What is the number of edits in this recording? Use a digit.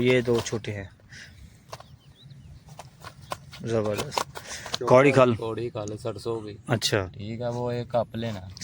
1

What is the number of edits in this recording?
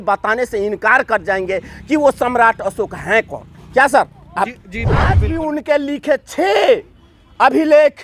1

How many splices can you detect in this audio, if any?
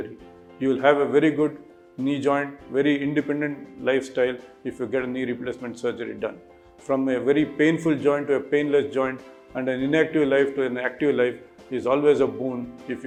0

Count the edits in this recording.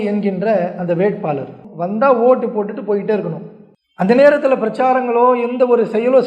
1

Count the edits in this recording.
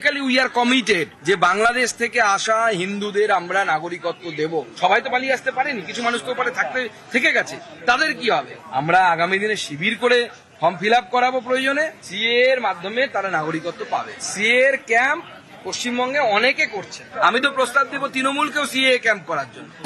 0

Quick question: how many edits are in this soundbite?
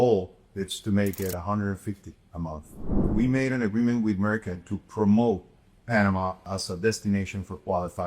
2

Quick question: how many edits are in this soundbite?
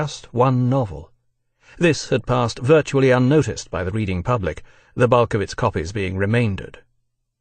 1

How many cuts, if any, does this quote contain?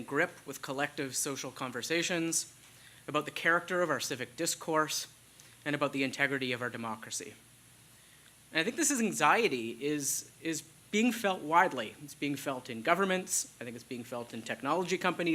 1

